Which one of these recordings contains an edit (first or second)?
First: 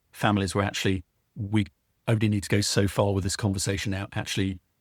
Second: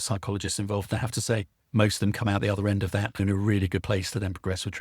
second